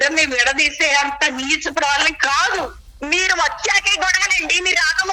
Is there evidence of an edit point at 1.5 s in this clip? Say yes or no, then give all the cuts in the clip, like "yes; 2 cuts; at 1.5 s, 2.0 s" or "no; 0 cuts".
no; 1 cut; at 2.8 s